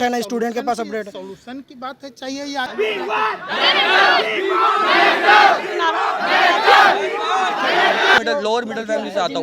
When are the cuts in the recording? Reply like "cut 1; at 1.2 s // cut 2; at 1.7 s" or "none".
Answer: cut 1; at 2.7 s // cut 2; at 8.2 s